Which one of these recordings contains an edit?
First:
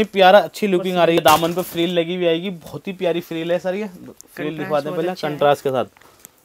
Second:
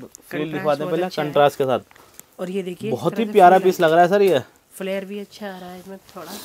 first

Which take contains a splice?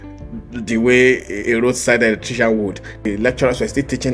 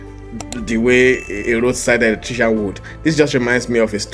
first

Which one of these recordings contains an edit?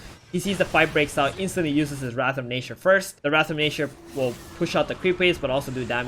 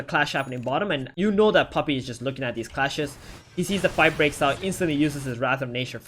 second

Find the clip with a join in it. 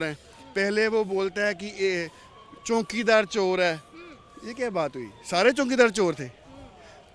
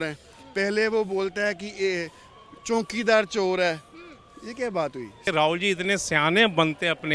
second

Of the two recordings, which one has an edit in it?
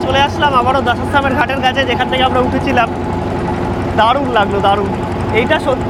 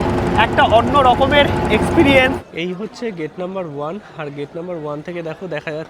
second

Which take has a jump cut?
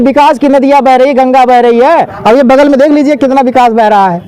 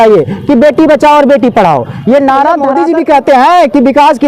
second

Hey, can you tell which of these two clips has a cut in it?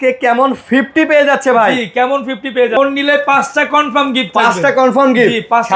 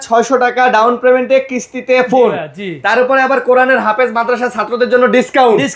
first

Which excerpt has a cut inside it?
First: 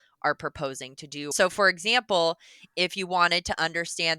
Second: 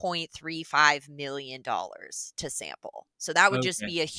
first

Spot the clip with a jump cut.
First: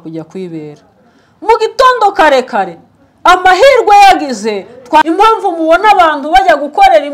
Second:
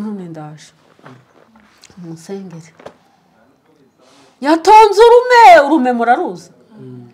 first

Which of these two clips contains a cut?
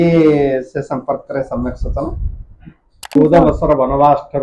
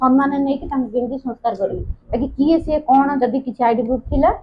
first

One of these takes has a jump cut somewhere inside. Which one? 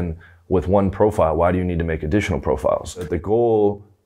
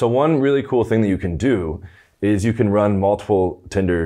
first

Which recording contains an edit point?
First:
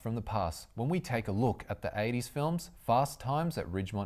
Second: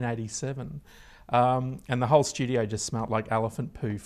first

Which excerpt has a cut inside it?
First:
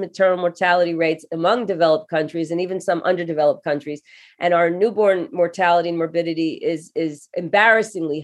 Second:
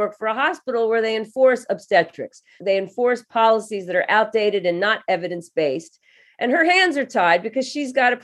first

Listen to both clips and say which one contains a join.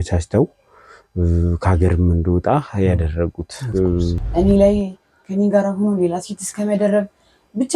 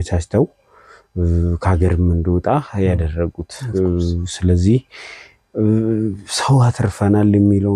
first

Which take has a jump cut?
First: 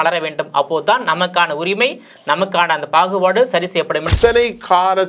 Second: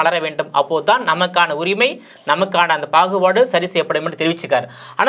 first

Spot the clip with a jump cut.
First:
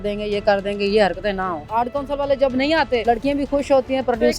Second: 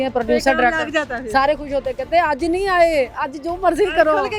first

